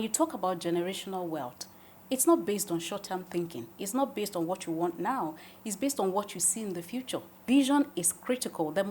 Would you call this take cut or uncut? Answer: cut